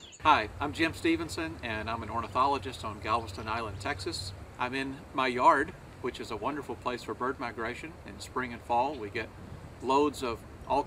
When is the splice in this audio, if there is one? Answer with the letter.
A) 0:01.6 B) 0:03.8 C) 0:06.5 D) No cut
A